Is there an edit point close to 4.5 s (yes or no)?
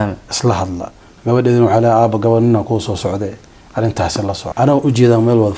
yes